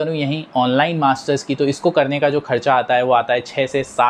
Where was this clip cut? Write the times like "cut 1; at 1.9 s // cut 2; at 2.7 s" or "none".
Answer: none